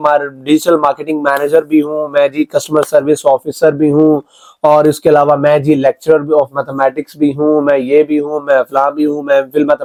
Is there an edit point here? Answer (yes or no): no